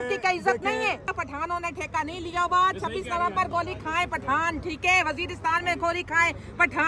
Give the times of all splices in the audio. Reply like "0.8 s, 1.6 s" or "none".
1.1 s